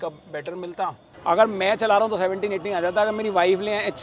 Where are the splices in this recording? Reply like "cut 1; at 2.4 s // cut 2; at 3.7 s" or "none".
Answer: cut 1; at 1.1 s